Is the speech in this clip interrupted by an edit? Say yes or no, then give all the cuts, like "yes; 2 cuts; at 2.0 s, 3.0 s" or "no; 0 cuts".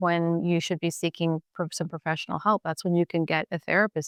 no; 0 cuts